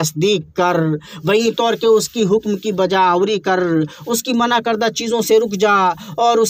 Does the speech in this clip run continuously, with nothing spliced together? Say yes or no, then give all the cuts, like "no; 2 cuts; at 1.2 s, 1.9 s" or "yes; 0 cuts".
yes; 0 cuts